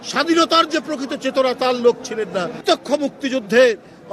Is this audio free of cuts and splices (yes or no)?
no